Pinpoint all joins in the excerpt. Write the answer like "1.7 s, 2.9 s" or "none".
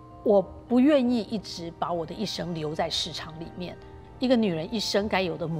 4.0 s